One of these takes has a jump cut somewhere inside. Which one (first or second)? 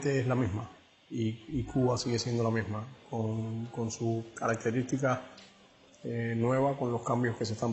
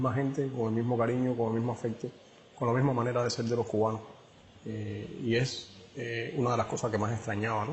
second